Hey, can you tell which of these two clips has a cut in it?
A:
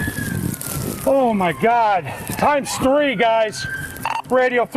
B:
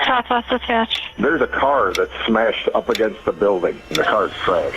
B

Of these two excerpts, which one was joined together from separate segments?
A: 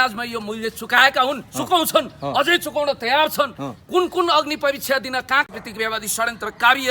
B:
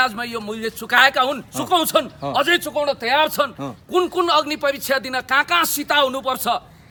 A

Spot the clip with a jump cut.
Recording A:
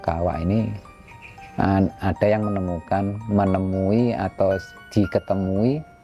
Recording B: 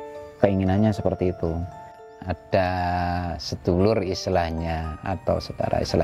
B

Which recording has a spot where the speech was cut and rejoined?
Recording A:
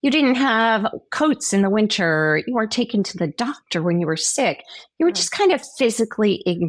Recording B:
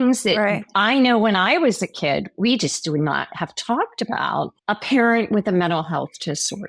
B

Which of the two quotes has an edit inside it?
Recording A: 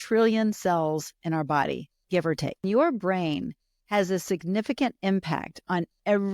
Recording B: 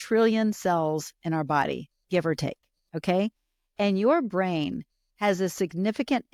A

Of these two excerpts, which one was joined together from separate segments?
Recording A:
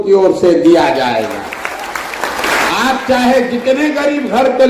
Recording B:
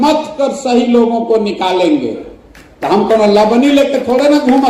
A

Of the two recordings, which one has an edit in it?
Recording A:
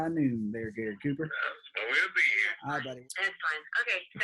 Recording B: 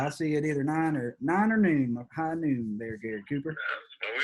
A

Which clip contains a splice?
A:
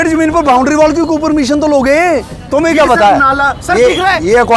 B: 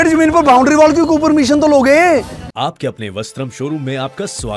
A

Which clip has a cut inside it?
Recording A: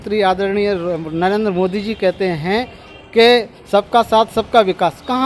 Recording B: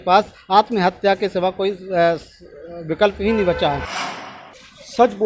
B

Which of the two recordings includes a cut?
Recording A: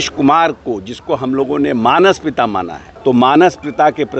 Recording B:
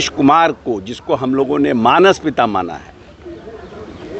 A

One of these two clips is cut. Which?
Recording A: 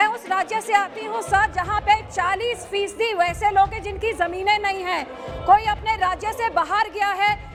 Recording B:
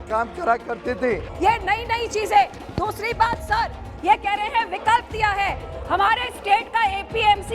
B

